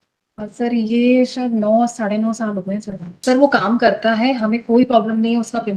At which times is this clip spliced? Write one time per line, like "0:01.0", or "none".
0:03.1